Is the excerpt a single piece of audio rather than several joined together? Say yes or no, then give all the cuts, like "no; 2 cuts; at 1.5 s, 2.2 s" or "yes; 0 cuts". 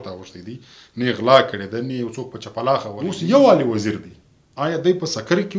no; 1 cut; at 2.9 s